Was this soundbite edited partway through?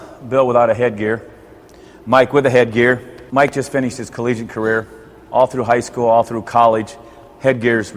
yes; 1 cut; at 3.1 s

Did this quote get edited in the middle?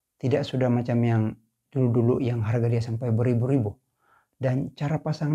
no; 0 cuts

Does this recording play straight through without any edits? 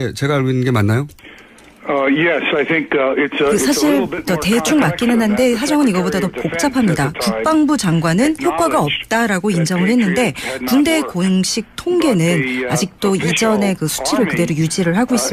yes; 0 cuts

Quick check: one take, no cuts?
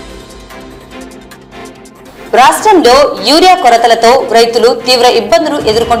yes; 0 cuts

